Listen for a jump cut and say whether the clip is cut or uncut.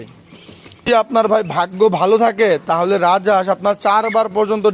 cut